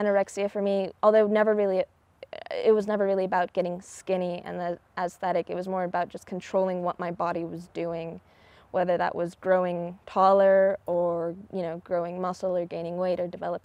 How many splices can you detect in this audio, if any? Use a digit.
0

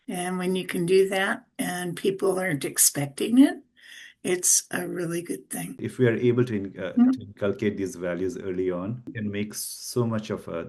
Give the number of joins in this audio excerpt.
1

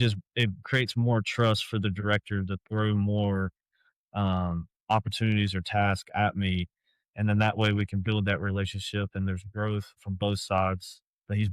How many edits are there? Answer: 1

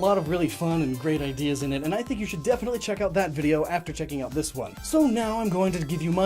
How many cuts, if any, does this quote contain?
1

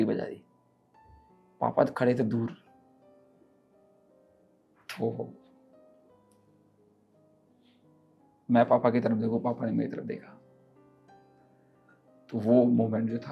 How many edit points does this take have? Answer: 0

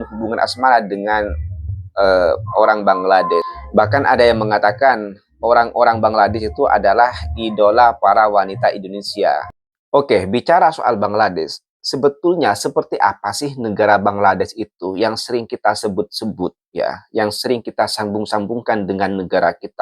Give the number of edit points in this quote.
0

